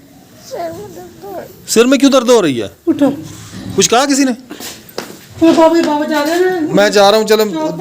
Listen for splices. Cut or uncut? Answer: cut